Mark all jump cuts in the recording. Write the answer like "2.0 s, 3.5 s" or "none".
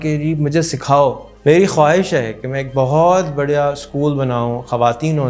1.3 s